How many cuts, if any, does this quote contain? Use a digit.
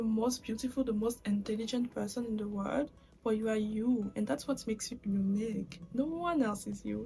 0